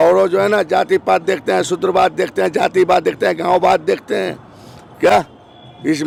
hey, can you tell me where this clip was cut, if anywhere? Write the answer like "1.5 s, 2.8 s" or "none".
none